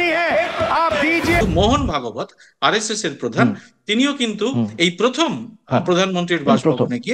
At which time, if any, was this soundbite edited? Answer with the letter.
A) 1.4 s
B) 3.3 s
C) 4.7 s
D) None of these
A